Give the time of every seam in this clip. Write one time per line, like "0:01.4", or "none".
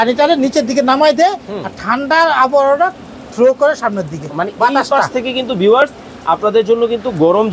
none